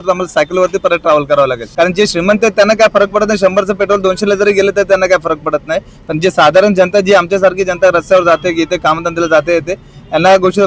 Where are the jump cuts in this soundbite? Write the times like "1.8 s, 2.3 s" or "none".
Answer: 1.7 s